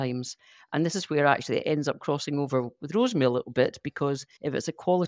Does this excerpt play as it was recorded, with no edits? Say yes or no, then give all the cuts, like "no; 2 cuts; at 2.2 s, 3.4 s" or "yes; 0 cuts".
yes; 0 cuts